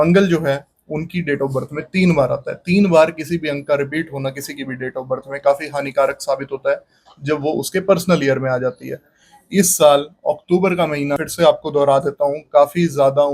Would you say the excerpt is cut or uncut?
cut